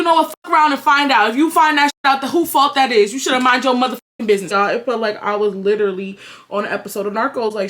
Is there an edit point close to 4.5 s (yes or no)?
yes